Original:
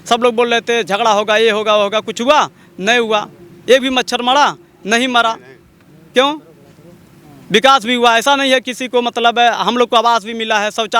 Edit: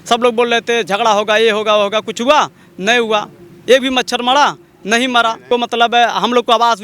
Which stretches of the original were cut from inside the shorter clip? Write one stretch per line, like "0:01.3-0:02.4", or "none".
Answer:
0:05.4-0:08.8